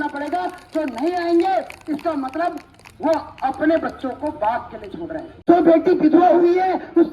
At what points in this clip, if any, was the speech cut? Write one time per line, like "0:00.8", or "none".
0:05.4